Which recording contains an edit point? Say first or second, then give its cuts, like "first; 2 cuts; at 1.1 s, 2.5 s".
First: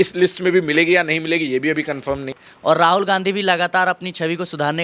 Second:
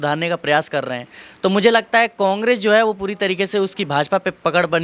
first; 1 cut; at 2.4 s